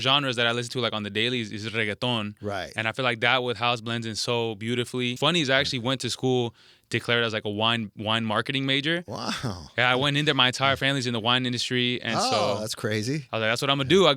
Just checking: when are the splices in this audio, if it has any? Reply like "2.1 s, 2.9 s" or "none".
5.1 s